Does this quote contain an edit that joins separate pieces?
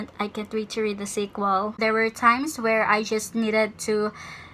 yes; 1 cut; at 1.7 s

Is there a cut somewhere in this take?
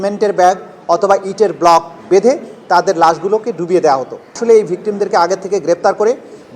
yes; 1 cut; at 4.4 s

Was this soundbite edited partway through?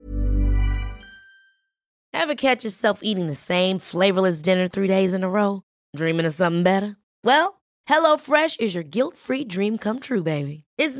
yes; 1 cut; at 2.1 s

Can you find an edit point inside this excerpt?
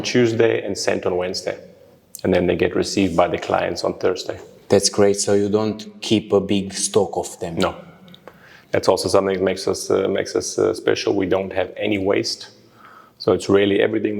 no; 0 cuts

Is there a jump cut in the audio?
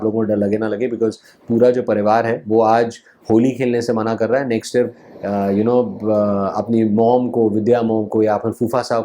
yes; 1 cut; at 5.1 s

